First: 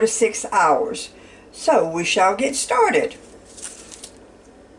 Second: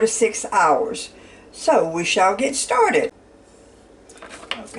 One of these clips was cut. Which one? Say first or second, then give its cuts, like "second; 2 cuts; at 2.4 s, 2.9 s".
second; 1 cut; at 3.1 s